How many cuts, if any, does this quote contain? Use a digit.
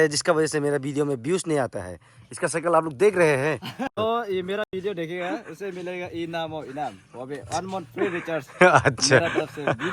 1